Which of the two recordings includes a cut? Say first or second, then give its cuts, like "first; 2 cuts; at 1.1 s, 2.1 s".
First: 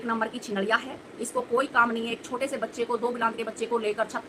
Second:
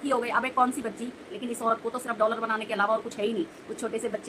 second; 1 cut; at 1.4 s